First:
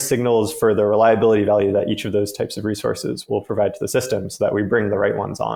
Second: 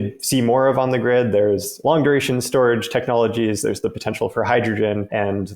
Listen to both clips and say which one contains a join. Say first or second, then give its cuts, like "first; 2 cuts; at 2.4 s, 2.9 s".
second; 1 cut; at 1.8 s